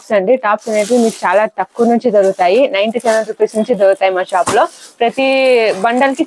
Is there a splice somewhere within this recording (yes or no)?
no